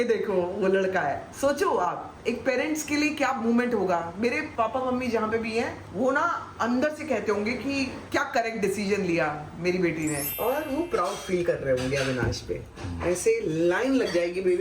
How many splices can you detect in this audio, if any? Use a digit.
1